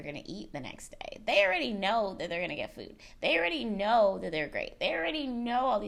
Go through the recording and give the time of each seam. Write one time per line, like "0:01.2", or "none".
none